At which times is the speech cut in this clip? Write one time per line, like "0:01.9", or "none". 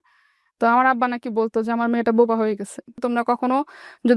0:02.9